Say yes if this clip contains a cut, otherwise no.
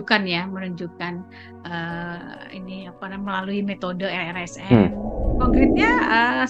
yes